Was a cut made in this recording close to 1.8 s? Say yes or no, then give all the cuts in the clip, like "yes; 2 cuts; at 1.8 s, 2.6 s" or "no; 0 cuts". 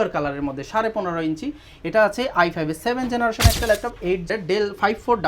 no; 1 cut; at 4.3 s